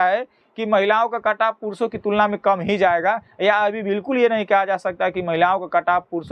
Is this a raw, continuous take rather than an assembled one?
yes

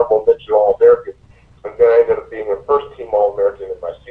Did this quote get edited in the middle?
yes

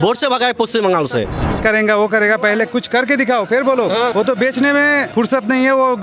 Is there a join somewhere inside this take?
yes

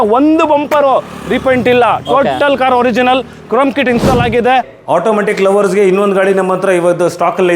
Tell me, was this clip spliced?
yes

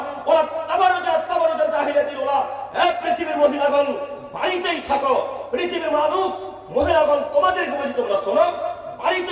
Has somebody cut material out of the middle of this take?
no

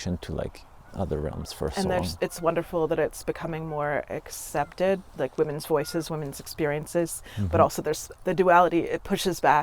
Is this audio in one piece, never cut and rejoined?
no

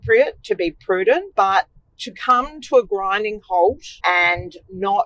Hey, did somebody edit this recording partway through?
yes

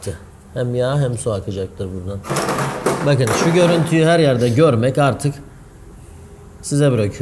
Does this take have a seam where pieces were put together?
no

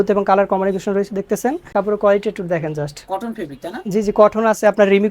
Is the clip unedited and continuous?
no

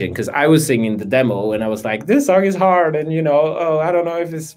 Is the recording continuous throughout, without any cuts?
yes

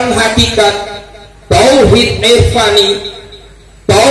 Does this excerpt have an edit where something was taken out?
no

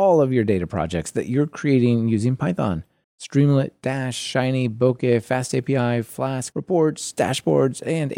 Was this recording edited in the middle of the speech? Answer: yes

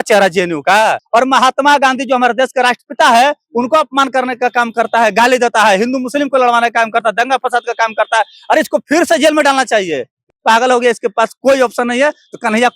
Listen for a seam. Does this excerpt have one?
yes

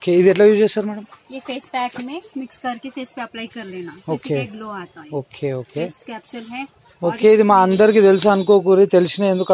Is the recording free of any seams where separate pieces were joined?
yes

